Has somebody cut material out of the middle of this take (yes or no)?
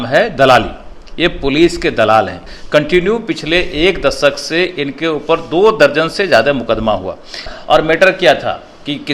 yes